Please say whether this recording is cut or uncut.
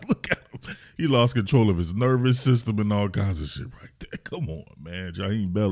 uncut